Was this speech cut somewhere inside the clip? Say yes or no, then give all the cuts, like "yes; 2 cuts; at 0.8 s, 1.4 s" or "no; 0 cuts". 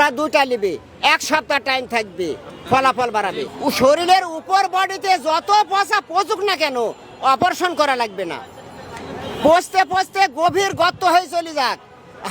yes; 1 cut; at 3.5 s